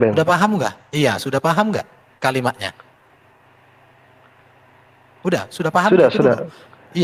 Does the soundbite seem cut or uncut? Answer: uncut